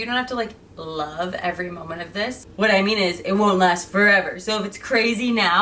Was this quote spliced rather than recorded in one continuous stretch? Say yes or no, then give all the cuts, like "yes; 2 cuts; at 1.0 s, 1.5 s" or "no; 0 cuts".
yes; 1 cut; at 2.4 s